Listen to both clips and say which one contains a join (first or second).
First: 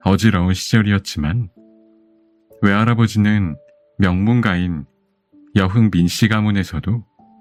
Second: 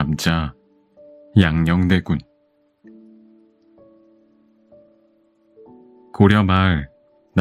second